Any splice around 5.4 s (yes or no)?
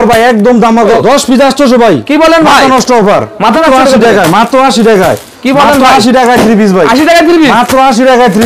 no